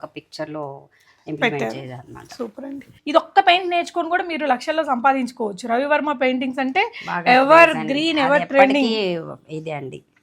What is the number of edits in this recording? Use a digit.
1